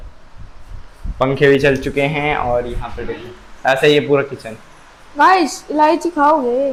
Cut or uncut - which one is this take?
uncut